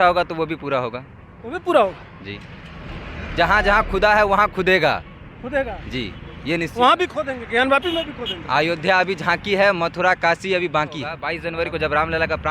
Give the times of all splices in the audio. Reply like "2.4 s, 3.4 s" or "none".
11.3 s